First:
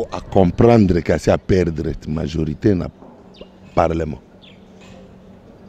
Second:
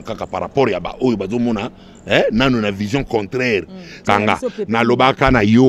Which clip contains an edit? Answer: second; 1 cut; at 3.9 s

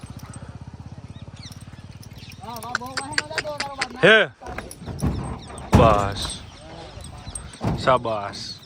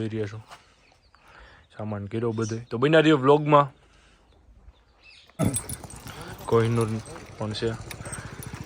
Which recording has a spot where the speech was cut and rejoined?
second; 1 cut; at 5.4 s

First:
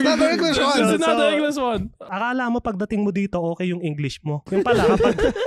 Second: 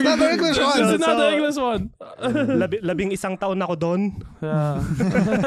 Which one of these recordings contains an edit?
first; 2 cuts; at 2.1 s, 4.4 s

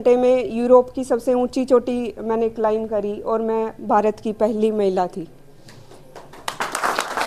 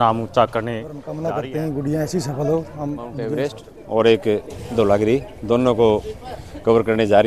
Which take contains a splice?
second; 2 cuts; at 1.0 s, 3.3 s

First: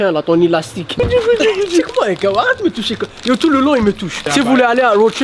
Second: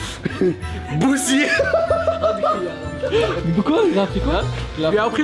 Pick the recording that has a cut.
first; 2 cuts; at 0.9 s, 4.3 s

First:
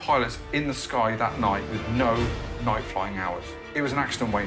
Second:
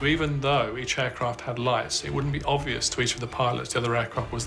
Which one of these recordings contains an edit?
first; 2 cuts; at 1.7 s, 3.6 s

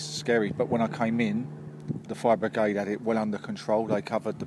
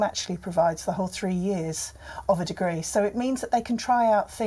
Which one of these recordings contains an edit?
first; 1 cut; at 2.0 s

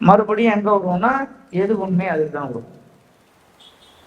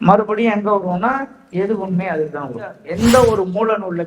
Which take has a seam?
second; 1 cut; at 2.8 s

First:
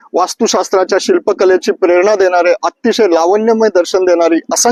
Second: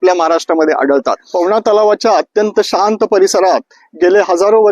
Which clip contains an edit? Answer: second; 1 cut; at 1.2 s

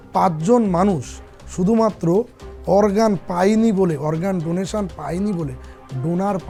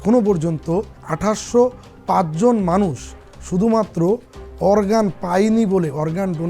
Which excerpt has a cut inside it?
second; 1 cut; at 1.0 s

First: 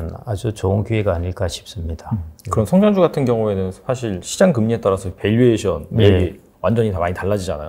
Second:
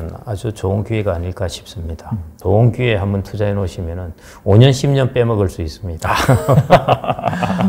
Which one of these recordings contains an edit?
second; 1 cut; at 2.3 s

